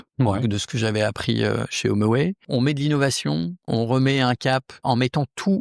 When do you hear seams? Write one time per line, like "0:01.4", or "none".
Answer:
0:02.4
0:03.7
0:04.8